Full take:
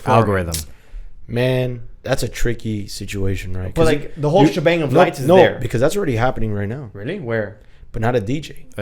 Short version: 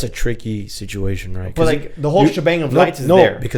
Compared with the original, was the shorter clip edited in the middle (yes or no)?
no